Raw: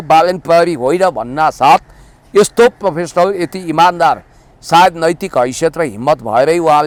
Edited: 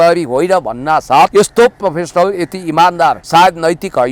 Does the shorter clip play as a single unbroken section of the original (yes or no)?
no